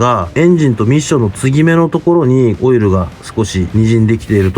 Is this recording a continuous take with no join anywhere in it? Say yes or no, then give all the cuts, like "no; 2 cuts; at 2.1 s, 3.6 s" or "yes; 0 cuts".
no; 1 cut; at 2.6 s